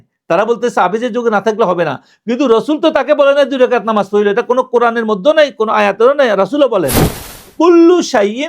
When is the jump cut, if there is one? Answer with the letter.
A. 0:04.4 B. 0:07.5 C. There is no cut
B